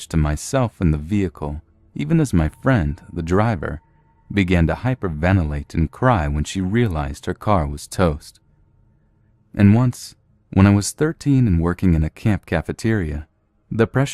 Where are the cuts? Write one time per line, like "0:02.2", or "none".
0:03.0